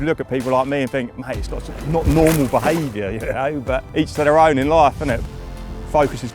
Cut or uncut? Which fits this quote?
cut